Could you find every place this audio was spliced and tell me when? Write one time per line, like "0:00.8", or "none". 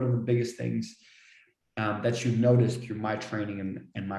none